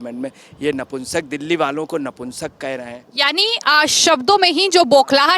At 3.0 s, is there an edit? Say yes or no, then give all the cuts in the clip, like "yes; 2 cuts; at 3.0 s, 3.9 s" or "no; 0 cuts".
no; 0 cuts